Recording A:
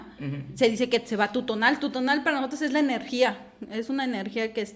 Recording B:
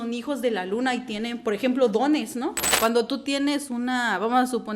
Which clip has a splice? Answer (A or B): B